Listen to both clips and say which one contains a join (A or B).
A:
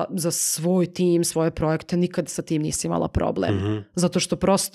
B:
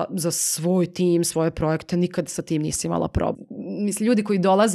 B